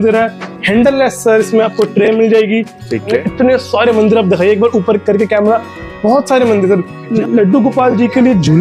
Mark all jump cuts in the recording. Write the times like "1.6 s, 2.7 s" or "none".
3.2 s, 7.0 s

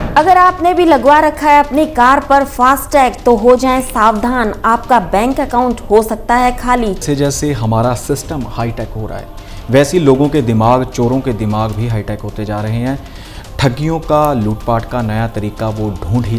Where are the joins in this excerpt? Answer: 7.0 s

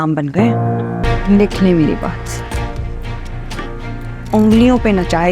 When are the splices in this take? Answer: 1.0 s

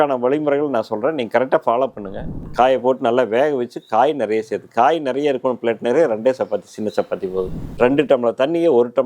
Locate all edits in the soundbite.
2.3 s, 7.6 s

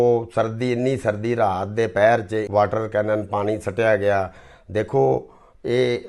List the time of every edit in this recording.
2.5 s

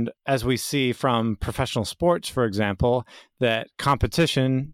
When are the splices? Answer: none

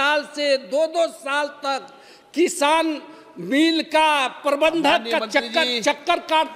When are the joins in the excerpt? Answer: none

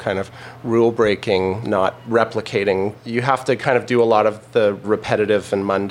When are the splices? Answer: 1.7 s, 3.1 s, 4.8 s

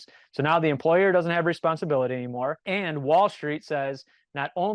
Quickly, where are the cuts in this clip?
2.6 s

